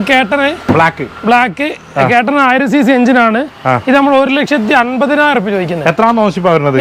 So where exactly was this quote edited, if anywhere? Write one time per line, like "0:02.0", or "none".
none